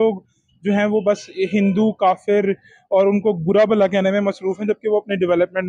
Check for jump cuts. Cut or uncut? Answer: uncut